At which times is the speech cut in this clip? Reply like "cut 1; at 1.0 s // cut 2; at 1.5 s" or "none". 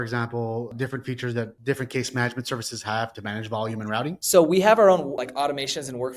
cut 1; at 0.9 s // cut 2; at 3.1 s // cut 3; at 4.2 s // cut 4; at 5.2 s